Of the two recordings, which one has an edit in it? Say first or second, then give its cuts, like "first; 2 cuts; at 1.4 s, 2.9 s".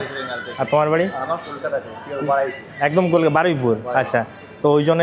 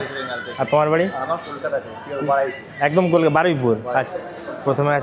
second; 1 cut; at 4.1 s